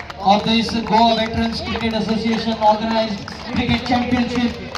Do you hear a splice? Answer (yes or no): no